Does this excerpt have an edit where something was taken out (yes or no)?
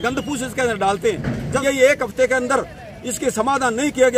yes